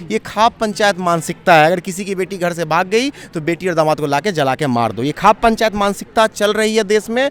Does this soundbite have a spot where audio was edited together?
no; 0 cuts

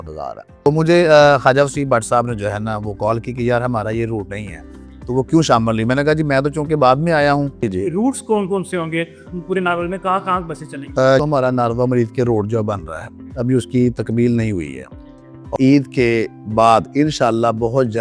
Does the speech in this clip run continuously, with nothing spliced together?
no; 4 cuts; at 0.7 s, 7.7 s, 11.2 s, 15.5 s

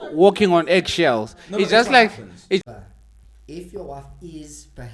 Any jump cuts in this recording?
yes; 1 cut; at 2.6 s

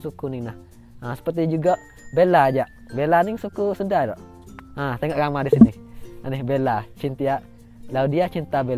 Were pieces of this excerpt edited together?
no; 0 cuts

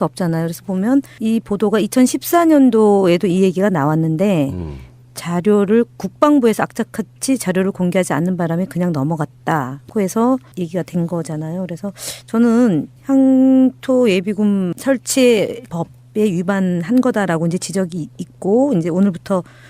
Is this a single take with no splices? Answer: no; 1 cut; at 11.1 s

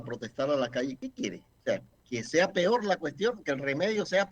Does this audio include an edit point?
yes; 1 cut; at 1.2 s

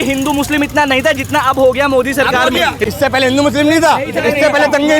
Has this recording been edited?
yes; 1 cut; at 2.8 s

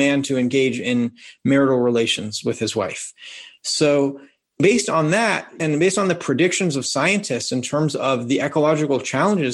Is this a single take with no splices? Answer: no; 2 cuts; at 4.6 s, 5.6 s

